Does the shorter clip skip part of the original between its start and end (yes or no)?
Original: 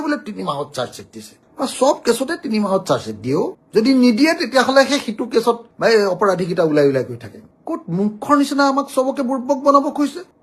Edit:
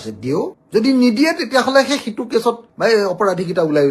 no